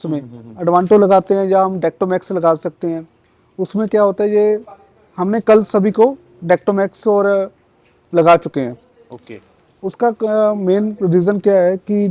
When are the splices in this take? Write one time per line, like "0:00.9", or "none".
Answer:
none